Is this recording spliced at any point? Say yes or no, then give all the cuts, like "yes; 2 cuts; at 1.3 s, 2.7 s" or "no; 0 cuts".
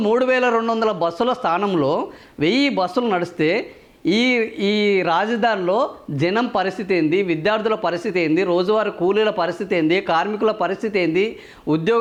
no; 0 cuts